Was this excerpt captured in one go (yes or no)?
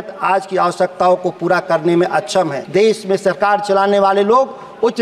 no